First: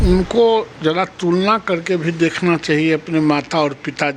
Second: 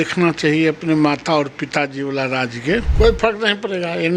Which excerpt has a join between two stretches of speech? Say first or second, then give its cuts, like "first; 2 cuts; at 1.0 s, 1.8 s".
second; 1 cut; at 2.9 s